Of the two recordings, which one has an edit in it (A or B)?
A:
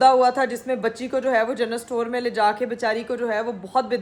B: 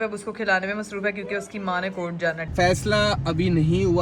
B